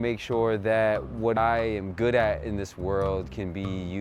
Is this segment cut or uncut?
cut